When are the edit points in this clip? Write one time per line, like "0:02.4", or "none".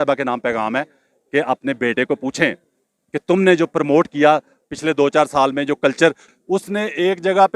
0:06.2